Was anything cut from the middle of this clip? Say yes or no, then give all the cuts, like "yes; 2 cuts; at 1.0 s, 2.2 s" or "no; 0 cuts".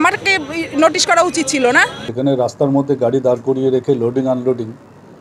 yes; 1 cut; at 2.0 s